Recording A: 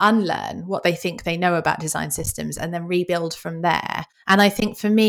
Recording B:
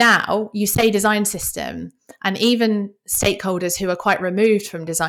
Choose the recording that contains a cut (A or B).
A